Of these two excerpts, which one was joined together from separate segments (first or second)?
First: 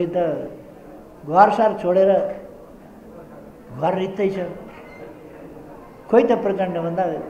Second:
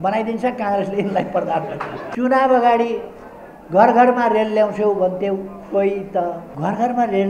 second